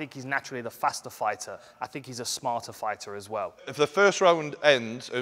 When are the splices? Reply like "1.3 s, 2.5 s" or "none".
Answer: 1.7 s, 3.6 s